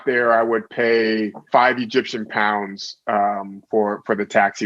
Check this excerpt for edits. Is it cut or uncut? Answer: cut